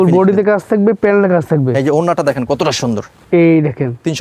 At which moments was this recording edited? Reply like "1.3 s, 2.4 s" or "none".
3.2 s